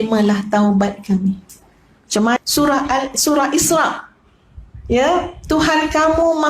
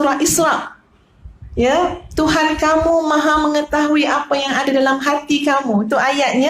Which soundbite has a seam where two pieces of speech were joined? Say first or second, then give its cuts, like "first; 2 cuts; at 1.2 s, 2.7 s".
first; 1 cut; at 2.4 s